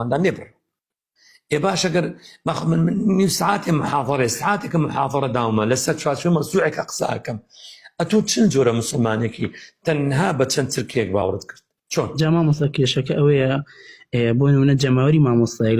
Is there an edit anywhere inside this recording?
no; 0 cuts

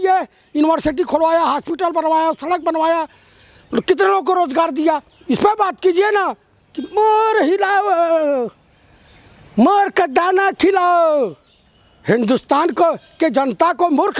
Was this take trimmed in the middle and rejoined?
no; 0 cuts

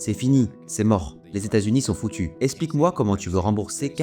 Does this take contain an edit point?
yes; 1 cut; at 2.3 s

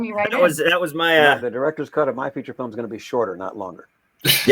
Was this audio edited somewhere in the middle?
yes; 1 cut; at 1.4 s

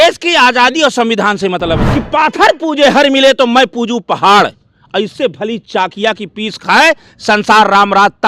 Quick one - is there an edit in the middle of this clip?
yes; 1 cut; at 1.8 s

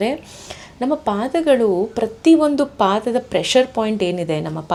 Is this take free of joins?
yes; 0 cuts

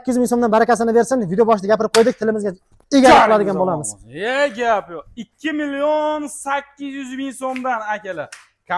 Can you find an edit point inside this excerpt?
no; 0 cuts

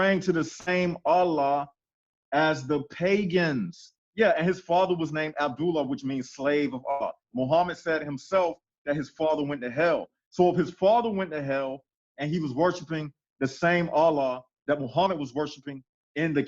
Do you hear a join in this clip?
no; 0 cuts

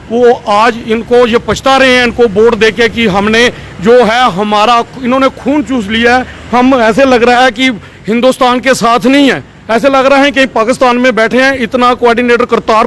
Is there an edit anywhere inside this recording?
no; 0 cuts

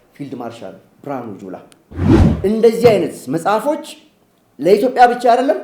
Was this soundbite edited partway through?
yes; 1 cut; at 2.2 s

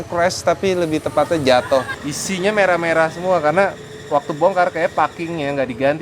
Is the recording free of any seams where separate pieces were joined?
no; 1 cut; at 2.0 s

